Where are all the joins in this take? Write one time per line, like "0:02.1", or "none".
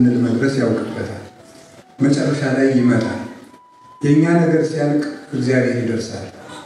none